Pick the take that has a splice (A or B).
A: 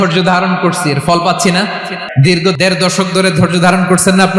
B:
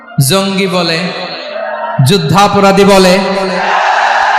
A